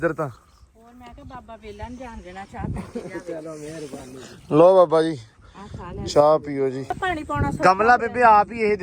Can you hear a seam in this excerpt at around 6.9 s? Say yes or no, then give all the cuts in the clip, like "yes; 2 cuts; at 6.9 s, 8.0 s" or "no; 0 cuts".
yes; 1 cut; at 6.9 s